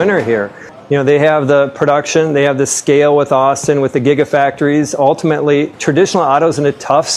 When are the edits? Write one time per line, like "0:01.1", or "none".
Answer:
none

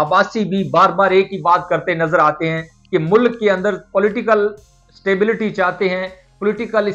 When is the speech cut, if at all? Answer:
none

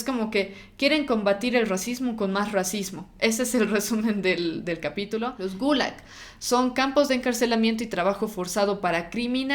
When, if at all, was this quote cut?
0:05.3

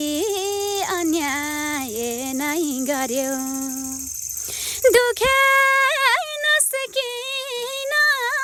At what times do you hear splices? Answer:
none

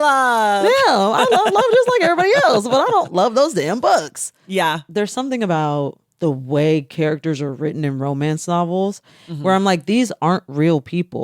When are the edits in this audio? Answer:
0:04.6
0:06.0

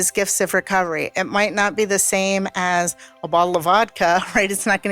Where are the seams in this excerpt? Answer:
none

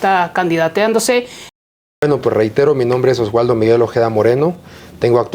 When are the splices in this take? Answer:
0:01.5

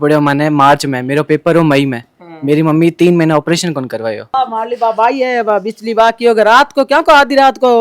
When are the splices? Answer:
0:04.2

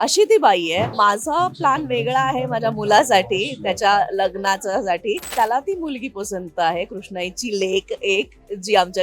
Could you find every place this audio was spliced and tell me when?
0:00.9
0:05.3

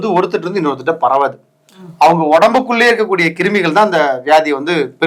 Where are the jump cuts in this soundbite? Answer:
none

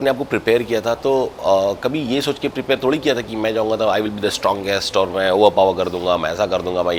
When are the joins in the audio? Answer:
none

